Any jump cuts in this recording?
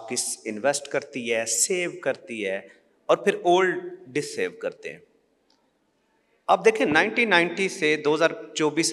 no; 0 cuts

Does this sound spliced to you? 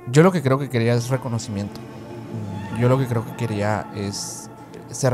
no; 0 cuts

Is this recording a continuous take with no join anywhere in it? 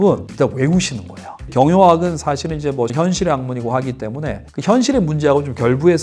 no; 2 cuts; at 1.4 s, 2.9 s

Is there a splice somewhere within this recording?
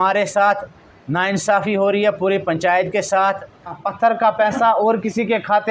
yes; 1 cut; at 3.8 s

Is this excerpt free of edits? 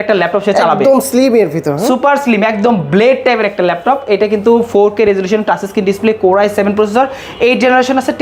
yes; 0 cuts

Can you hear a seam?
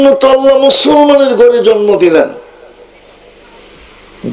no; 0 cuts

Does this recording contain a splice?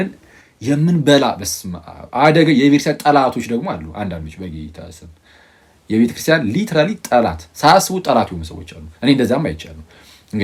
no; 0 cuts

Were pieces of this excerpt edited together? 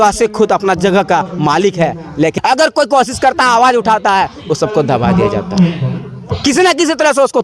yes; 1 cut; at 2.4 s

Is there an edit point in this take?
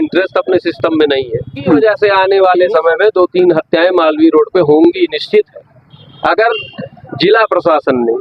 yes; 1 cut; at 1.8 s

